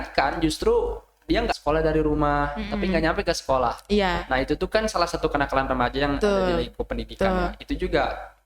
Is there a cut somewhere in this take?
yes; 1 cut; at 1.6 s

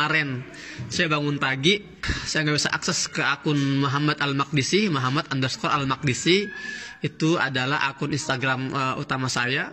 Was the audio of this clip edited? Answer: no; 0 cuts

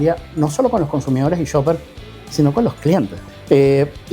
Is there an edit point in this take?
yes; 1 cut; at 3.2 s

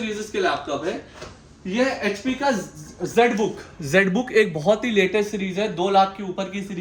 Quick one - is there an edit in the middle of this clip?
no; 0 cuts

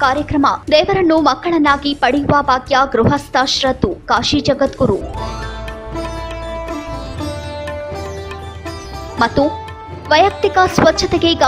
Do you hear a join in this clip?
no; 0 cuts

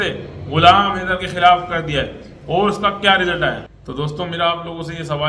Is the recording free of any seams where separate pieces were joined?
no; 1 cut; at 3.8 s

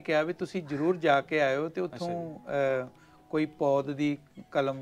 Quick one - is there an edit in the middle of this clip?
no; 0 cuts

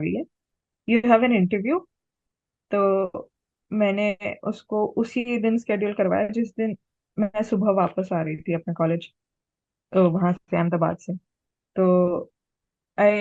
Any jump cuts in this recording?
no; 0 cuts

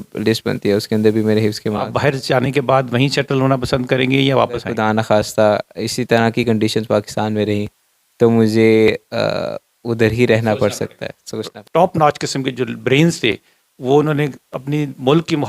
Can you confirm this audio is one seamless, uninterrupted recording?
no; 3 cuts; at 1.9 s, 4.7 s, 11.6 s

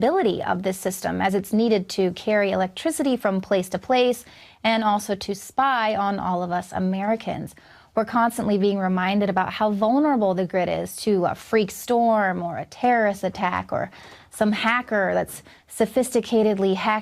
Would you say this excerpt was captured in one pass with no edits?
no; 1 cut; at 4.9 s

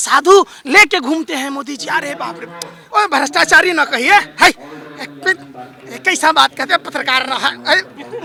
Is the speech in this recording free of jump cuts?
yes; 0 cuts

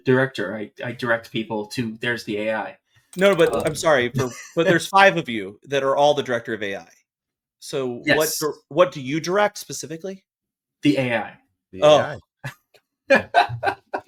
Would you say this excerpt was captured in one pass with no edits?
yes; 0 cuts

